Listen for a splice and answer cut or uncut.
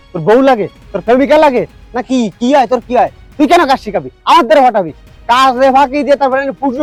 uncut